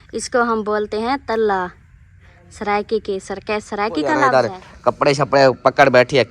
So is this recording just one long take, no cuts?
no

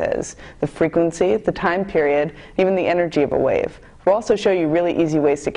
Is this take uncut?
yes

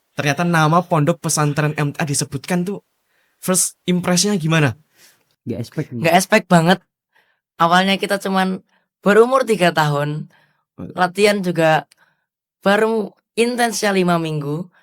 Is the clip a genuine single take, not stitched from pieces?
no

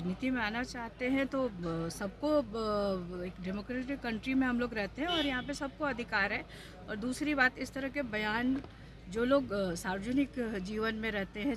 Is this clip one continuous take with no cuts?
yes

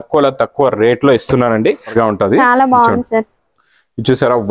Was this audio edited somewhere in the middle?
yes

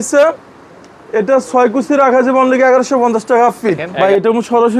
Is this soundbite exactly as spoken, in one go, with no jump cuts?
no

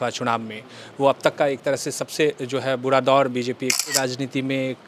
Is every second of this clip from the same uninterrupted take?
no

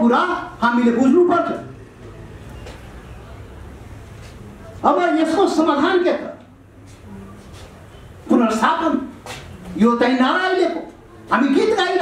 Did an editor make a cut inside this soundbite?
no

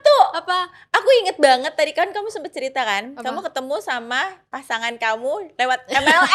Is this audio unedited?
yes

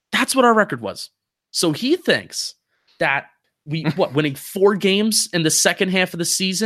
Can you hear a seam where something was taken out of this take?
yes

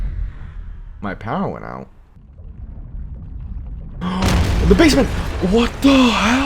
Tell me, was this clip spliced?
yes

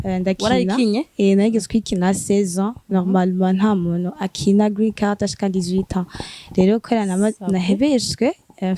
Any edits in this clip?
no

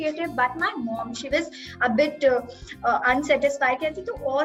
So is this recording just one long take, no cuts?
yes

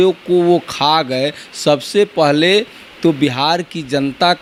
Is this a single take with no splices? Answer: yes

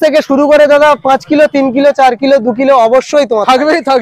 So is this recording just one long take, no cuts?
yes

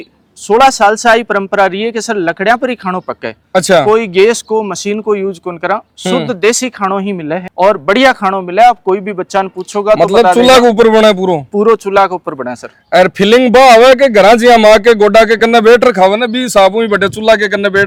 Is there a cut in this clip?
no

